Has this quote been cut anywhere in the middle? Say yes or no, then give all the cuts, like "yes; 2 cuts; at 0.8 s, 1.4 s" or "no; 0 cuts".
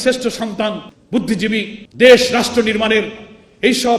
yes; 2 cuts; at 0.9 s, 1.8 s